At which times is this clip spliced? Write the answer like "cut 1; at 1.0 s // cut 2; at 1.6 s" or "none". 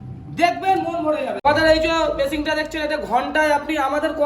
cut 1; at 1.4 s